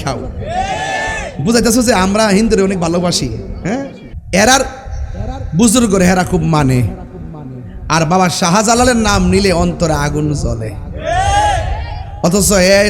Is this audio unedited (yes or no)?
no